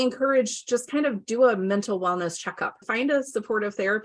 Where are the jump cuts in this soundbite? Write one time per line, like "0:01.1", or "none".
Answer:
0:02.8